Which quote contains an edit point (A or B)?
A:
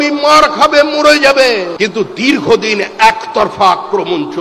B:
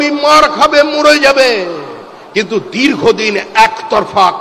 A